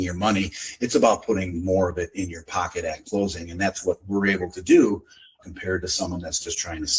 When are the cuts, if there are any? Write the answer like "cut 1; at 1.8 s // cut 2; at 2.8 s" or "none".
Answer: cut 1; at 5.4 s